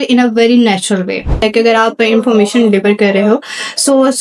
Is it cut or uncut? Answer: cut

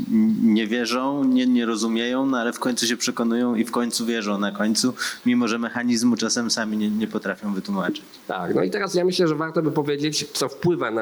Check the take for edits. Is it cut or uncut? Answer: uncut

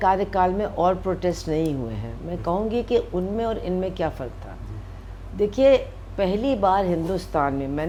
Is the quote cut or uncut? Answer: uncut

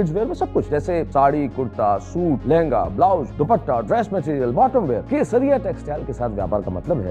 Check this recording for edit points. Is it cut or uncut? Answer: cut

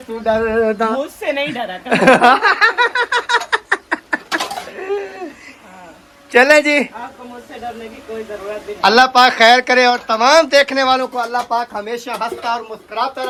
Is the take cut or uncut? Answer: uncut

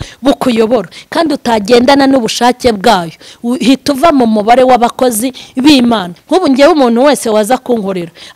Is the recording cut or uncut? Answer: cut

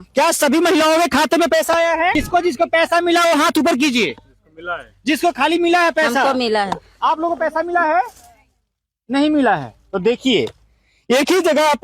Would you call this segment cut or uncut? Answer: cut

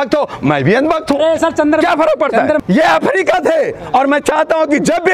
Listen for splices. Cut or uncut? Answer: uncut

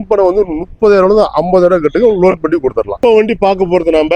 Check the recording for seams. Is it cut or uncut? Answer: uncut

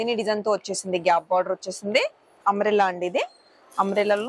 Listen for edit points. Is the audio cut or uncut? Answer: cut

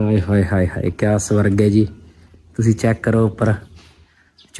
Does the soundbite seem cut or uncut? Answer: uncut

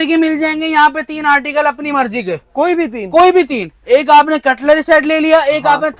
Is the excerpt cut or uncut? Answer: uncut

